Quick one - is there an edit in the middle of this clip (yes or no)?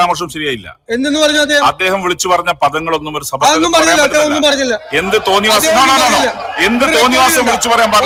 no